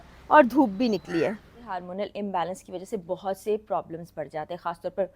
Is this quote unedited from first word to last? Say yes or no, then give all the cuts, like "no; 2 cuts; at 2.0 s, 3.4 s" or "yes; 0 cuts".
no; 1 cut; at 1.8 s